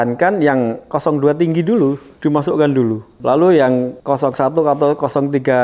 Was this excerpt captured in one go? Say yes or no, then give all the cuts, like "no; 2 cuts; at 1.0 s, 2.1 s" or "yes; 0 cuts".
no; 2 cuts; at 3.2 s, 3.9 s